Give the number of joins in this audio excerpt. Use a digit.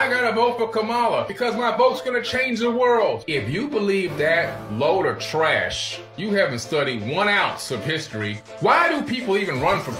0